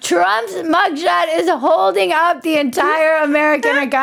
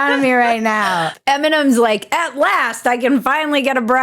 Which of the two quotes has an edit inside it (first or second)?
second